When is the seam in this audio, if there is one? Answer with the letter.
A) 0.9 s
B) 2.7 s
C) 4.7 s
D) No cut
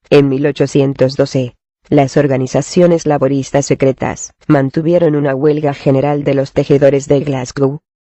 A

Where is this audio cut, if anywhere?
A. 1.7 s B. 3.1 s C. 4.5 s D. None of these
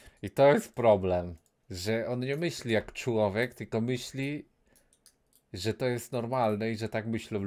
D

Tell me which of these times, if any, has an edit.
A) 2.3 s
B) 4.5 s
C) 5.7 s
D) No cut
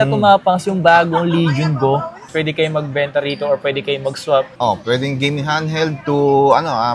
A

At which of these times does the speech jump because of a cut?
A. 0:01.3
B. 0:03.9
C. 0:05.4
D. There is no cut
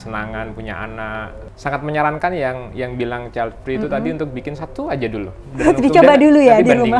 A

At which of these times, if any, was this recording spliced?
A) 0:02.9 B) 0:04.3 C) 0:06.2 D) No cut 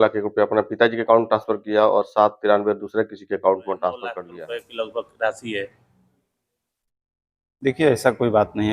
B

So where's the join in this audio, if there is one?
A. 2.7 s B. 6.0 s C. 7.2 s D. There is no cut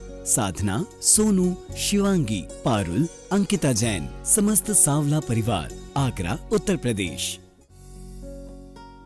C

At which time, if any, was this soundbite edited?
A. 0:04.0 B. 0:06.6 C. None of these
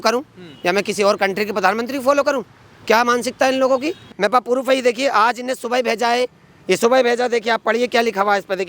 A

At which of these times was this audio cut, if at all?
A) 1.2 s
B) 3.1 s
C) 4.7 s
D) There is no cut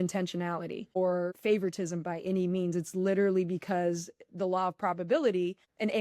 A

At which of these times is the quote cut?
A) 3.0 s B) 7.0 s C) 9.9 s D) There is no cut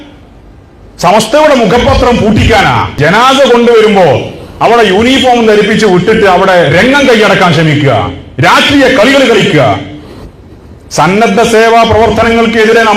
A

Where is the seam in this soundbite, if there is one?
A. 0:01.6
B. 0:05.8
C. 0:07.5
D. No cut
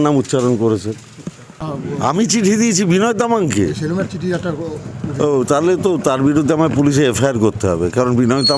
A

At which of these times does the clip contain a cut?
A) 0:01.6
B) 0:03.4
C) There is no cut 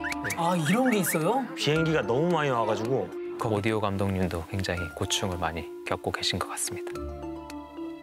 B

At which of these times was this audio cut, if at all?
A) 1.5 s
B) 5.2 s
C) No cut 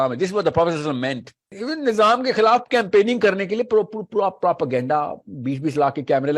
A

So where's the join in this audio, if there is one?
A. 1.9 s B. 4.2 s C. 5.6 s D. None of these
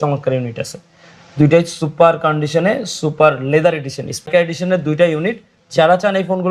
B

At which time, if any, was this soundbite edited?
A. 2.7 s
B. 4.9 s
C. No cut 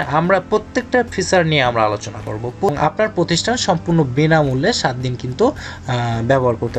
A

